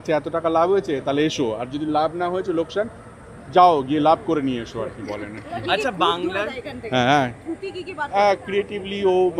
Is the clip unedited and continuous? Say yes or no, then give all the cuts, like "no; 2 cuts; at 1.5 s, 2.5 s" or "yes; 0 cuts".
yes; 0 cuts